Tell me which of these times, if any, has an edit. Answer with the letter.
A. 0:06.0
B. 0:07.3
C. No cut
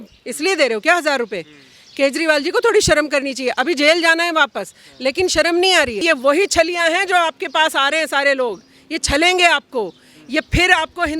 A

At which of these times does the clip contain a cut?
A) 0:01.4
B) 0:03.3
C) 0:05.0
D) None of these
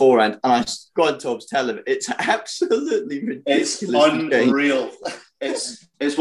D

